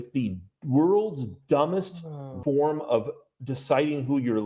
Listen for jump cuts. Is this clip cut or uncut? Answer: cut